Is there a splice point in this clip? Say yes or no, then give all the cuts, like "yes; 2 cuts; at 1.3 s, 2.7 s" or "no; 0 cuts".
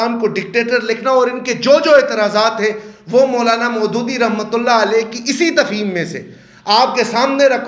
no; 0 cuts